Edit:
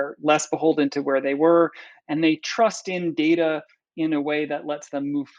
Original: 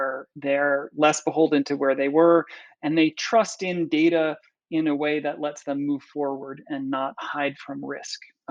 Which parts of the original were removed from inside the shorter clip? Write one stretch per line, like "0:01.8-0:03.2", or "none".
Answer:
none